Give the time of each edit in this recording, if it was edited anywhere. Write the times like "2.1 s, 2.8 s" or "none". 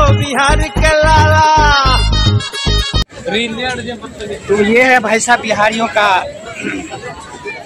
none

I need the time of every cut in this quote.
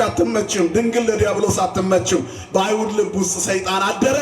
none

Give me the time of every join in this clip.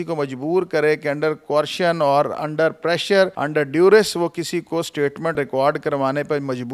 3.4 s, 5.4 s

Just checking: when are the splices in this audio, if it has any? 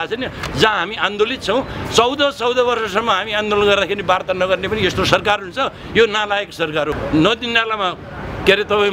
7.0 s

